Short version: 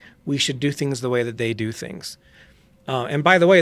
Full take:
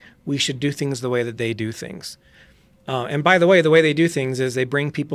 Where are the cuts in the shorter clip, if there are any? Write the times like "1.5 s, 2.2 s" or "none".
none